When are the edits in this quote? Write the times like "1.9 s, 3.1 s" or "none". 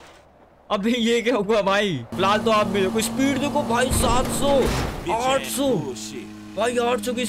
2.1 s